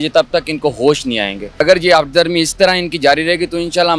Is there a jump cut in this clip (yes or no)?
yes